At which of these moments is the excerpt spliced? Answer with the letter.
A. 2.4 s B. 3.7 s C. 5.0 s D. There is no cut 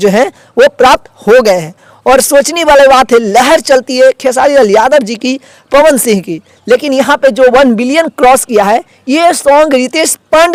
D